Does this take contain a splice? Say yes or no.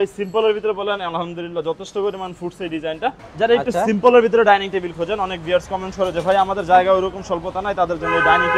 yes